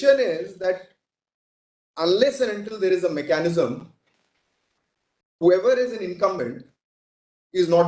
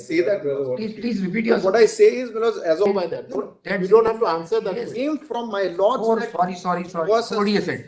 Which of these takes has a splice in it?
second; 1 cut; at 2.9 s

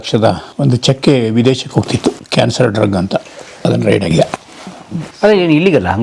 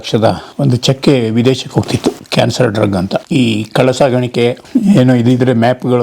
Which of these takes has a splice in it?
second; 2 cuts; at 3.2 s, 4.6 s

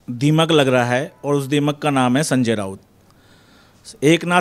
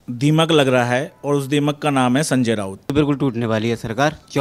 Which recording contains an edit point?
second; 1 cut; at 2.9 s

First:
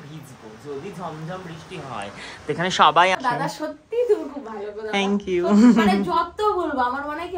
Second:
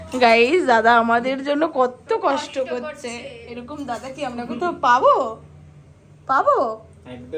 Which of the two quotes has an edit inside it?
first; 1 cut; at 3.2 s

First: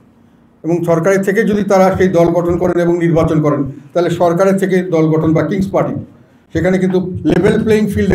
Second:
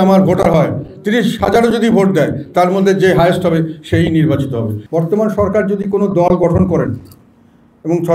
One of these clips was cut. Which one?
second; 1 cut; at 4.8 s

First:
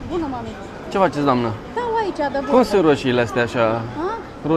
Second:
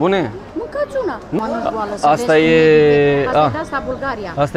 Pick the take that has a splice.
second; 1 cut; at 1.4 s

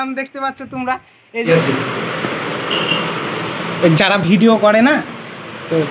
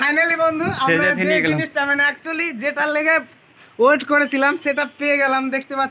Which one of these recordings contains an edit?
first; 1 cut; at 1.5 s

